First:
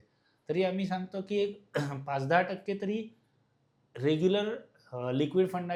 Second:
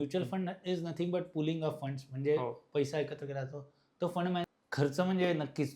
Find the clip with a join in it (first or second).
second